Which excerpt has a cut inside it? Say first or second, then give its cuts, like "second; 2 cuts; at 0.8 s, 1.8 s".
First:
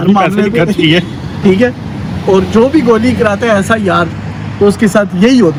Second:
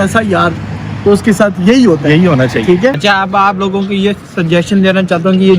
second; 1 cut; at 3.0 s